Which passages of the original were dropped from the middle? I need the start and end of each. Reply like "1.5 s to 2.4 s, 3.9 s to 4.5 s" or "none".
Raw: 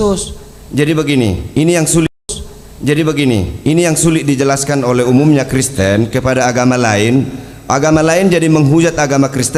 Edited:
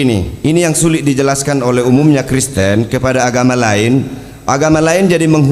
2.0 s to 4.1 s

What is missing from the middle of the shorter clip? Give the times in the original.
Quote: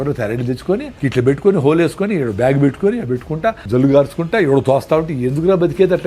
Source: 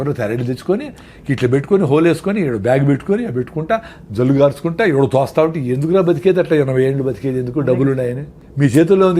0.9 s to 1.2 s, 3.9 s to 4.1 s

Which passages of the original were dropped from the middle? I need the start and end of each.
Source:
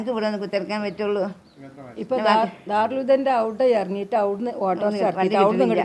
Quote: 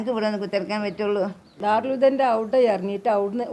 1.5 s to 2.6 s

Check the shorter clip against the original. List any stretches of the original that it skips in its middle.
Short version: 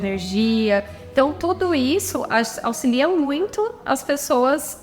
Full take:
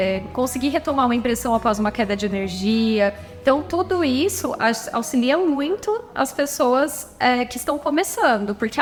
none

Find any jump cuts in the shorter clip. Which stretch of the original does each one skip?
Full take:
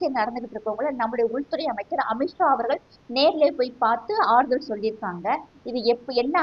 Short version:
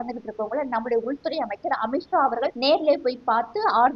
2.8 s to 3.1 s

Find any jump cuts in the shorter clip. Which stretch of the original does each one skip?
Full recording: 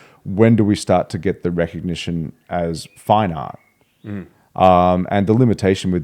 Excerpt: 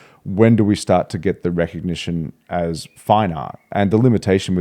3.7 s to 5.1 s

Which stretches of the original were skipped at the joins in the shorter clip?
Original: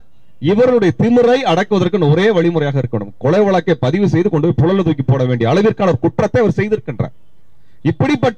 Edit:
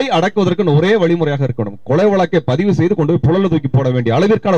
none

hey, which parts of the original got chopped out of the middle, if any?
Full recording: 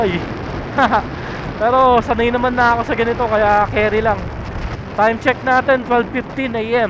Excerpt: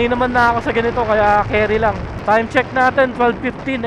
4.3 s to 4.8 s

